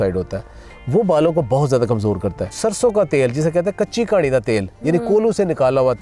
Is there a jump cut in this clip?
yes; 1 cut; at 2.5 s

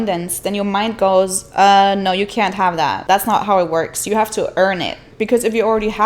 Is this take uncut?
yes; 0 cuts

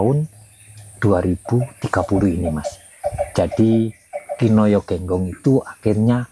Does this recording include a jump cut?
no; 0 cuts

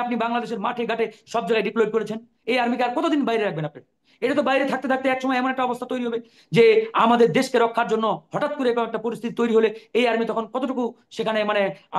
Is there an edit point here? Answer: no; 0 cuts

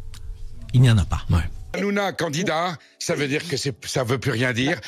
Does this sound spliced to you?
yes; 1 cut; at 1.7 s

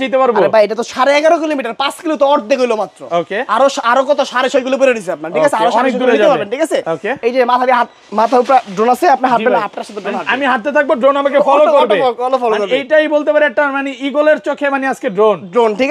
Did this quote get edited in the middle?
no; 0 cuts

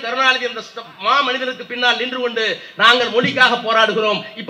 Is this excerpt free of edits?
yes; 0 cuts

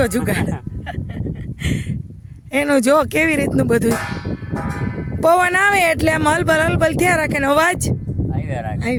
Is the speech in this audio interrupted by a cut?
no; 0 cuts

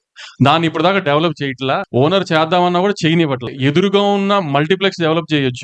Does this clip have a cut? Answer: yes; 2 cuts; at 1.9 s, 3.5 s

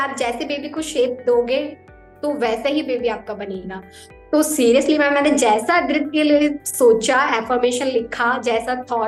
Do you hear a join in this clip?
no; 0 cuts

